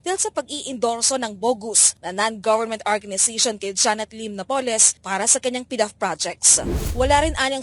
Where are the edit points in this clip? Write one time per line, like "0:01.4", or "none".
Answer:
0:06.7